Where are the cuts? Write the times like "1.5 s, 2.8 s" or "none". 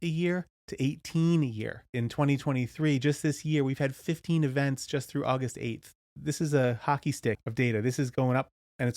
1.9 s, 6.1 s, 7.4 s